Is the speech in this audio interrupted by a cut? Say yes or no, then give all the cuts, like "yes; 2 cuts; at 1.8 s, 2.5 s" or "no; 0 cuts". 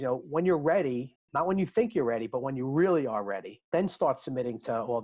yes; 1 cut; at 3.7 s